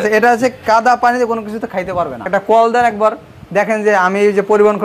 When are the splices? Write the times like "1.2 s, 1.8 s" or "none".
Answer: 2.2 s